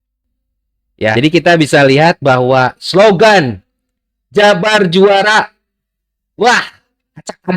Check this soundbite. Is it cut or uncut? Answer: cut